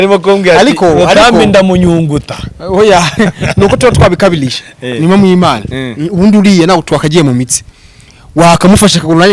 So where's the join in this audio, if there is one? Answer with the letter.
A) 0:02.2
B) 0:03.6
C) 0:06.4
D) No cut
D